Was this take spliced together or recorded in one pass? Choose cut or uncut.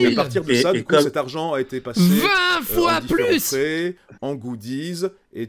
uncut